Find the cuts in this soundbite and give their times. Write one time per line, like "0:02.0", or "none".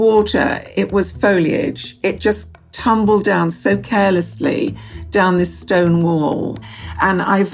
0:06.6